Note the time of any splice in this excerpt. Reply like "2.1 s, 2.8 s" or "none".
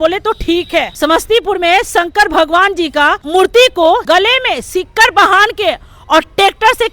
0.9 s, 3.2 s, 4.0 s